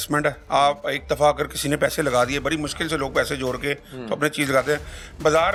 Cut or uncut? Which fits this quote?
uncut